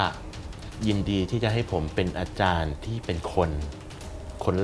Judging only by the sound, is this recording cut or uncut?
uncut